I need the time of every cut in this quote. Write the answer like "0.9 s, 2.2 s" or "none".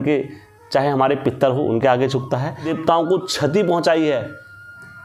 2.7 s